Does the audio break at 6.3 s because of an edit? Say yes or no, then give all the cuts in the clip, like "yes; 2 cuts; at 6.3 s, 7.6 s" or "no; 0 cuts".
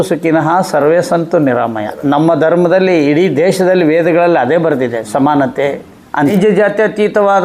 yes; 1 cut; at 6.3 s